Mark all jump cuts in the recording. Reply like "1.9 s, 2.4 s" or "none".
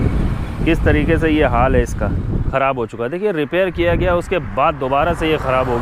2.4 s